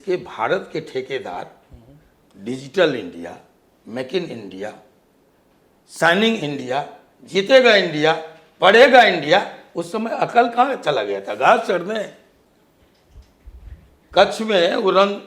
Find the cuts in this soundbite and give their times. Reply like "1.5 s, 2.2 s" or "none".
none